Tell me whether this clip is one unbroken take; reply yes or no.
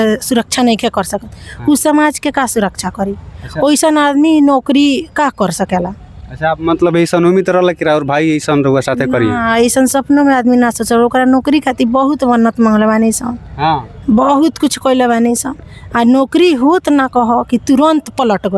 yes